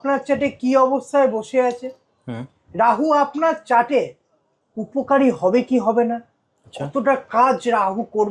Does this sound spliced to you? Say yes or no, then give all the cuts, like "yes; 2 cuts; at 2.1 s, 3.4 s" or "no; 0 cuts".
no; 0 cuts